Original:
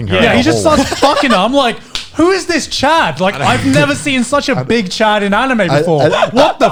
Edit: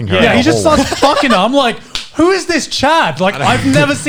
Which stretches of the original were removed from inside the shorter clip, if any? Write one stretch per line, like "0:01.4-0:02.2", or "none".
none